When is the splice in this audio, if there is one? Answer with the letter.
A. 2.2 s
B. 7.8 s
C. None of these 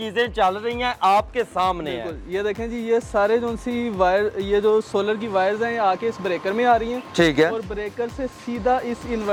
C